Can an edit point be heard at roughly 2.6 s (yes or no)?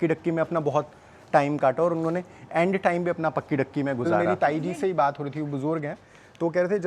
no